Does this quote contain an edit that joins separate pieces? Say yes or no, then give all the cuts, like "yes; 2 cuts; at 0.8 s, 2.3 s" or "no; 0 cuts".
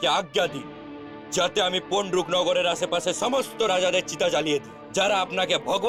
no; 0 cuts